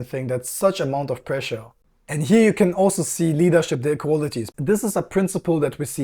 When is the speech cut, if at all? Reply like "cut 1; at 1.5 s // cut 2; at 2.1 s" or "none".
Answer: cut 1; at 1.7 s // cut 2; at 4.5 s